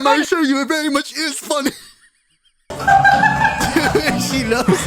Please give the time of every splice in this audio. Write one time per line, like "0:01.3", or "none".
0:02.7